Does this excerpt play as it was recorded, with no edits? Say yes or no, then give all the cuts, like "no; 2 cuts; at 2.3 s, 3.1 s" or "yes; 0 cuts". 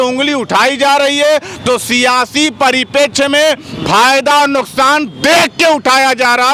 yes; 0 cuts